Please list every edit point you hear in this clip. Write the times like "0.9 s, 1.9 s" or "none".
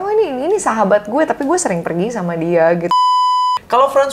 3.1 s

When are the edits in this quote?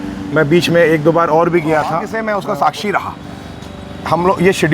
2.1 s

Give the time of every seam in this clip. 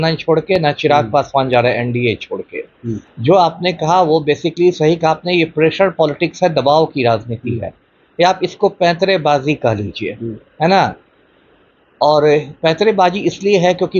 none

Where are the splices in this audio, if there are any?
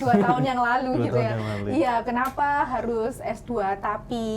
none

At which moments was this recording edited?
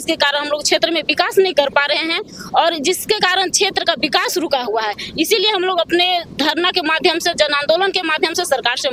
none

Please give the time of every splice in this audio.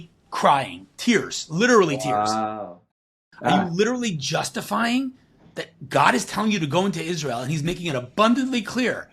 2.8 s

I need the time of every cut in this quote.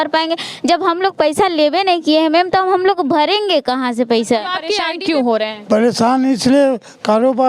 4.8 s

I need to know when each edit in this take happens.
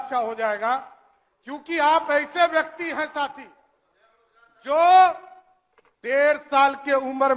none

